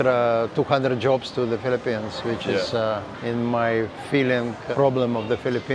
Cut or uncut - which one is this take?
cut